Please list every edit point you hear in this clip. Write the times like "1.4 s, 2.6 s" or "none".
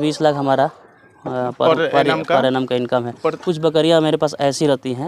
3.4 s